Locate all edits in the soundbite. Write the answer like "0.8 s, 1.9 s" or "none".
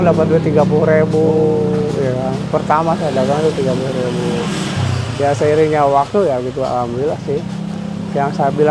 none